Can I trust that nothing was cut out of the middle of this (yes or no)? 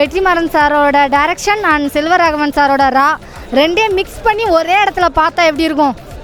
yes